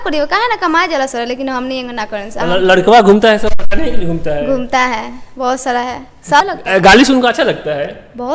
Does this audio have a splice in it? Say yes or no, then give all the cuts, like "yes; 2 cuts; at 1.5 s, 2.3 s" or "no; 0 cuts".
yes; 1 cut; at 6.4 s